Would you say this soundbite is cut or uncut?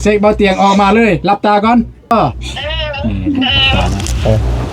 cut